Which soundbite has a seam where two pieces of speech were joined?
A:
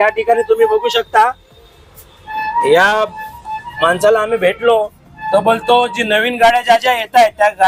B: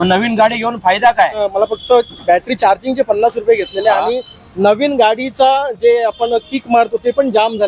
B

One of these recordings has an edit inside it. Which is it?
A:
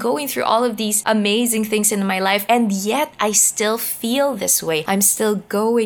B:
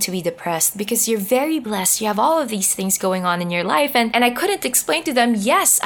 A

